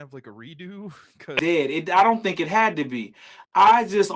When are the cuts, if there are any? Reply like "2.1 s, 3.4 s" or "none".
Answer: 1.3 s